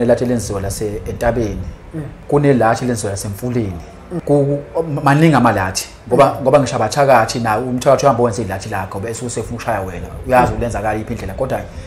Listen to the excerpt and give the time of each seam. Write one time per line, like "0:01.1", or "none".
0:02.1
0:04.2